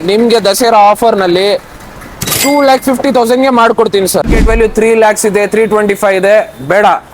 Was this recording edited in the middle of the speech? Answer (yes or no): yes